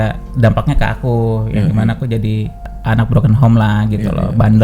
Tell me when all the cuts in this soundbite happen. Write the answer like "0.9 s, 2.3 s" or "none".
2.6 s